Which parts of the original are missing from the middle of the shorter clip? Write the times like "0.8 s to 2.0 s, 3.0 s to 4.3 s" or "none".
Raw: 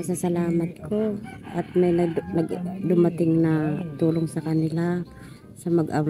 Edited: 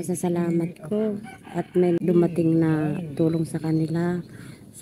2.0 s to 2.8 s